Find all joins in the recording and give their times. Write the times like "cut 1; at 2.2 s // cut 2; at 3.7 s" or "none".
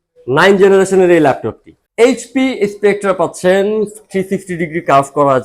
cut 1; at 1.8 s